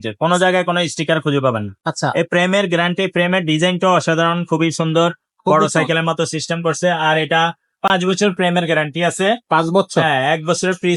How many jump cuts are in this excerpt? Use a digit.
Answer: 0